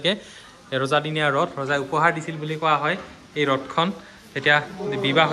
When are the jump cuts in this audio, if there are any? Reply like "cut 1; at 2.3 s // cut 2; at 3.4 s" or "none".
none